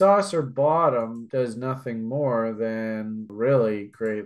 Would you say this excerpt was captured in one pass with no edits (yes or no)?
no